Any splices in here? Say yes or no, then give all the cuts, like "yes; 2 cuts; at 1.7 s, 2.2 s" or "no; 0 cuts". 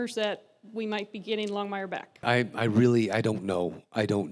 yes; 1 cut; at 2.2 s